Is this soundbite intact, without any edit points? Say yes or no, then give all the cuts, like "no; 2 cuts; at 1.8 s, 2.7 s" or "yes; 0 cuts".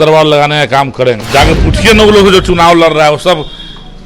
no; 1 cut; at 1.2 s